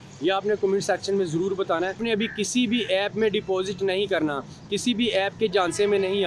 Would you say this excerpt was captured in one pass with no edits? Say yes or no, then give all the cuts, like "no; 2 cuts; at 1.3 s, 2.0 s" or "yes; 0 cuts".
no; 1 cut; at 2.0 s